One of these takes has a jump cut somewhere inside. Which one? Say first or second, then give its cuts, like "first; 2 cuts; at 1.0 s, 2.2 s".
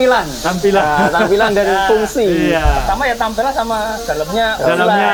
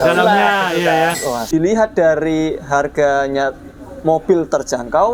second; 1 cut; at 1.5 s